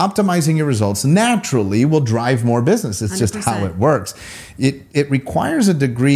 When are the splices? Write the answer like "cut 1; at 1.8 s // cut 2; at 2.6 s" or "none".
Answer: none